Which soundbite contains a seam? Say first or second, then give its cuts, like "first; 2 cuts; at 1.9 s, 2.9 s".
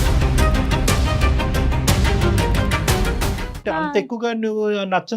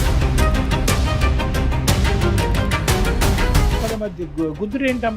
first; 1 cut; at 3.6 s